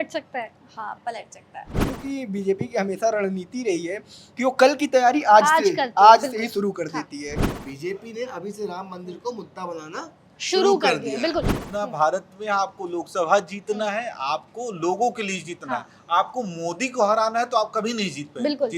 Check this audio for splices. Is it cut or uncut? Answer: cut